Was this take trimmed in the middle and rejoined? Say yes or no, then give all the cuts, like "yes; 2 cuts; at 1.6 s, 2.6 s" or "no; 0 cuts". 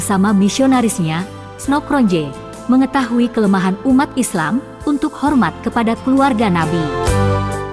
yes; 1 cut; at 4.7 s